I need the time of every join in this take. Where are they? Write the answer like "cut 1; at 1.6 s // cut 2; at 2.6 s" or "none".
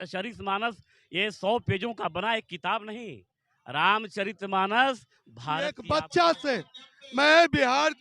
cut 1; at 5.7 s